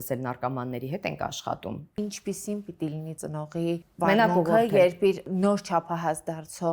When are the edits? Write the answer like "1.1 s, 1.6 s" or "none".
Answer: 2.0 s, 3.5 s, 5.2 s